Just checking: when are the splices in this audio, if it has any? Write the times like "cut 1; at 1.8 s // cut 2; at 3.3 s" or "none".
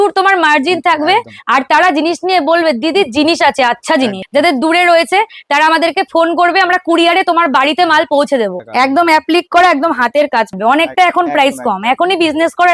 cut 1; at 4.2 s // cut 2; at 8.6 s // cut 3; at 10.5 s